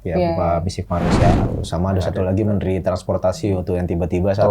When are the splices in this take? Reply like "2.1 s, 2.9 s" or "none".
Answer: 1.4 s

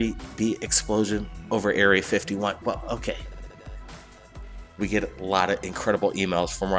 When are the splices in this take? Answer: 5.0 s

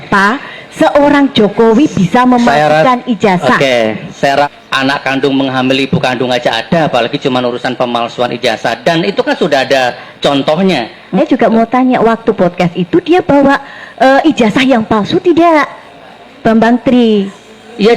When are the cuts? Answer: 4.5 s, 11.2 s

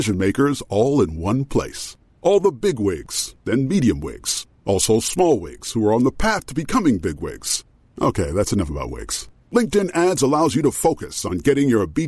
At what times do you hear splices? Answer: none

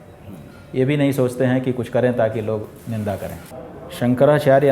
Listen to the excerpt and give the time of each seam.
3.5 s

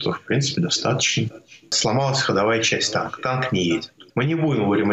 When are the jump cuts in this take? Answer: 1.8 s, 4.0 s

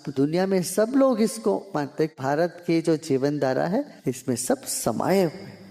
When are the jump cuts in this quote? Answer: 2.1 s, 3.9 s

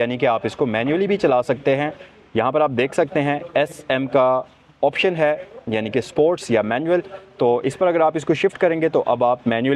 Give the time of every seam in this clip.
none

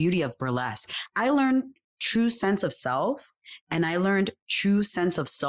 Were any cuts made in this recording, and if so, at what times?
0.9 s

